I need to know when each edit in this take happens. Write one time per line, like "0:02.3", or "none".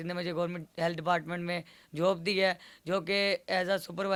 none